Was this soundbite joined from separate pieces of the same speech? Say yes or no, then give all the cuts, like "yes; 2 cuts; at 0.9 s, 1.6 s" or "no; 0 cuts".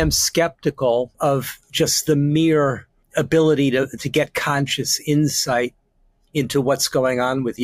yes; 2 cuts; at 1.1 s, 3.0 s